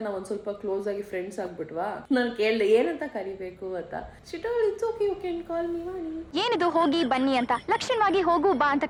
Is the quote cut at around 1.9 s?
no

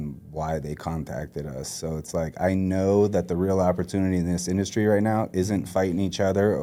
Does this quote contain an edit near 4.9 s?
no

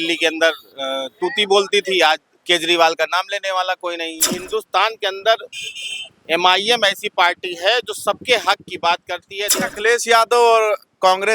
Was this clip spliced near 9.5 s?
yes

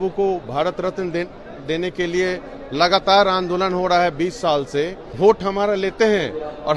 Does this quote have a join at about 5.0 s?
yes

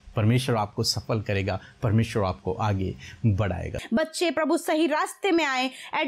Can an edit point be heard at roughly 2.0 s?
no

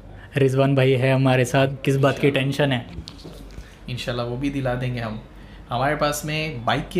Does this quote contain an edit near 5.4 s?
no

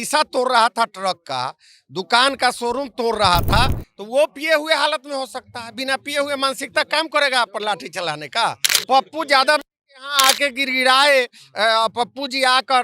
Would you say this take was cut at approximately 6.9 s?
no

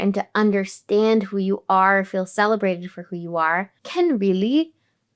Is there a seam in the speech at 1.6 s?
no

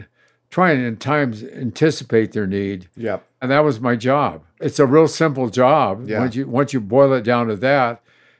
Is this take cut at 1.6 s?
no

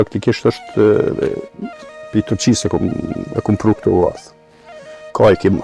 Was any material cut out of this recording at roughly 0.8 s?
no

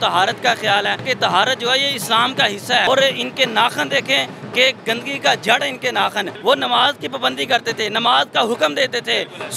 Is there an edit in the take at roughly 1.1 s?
yes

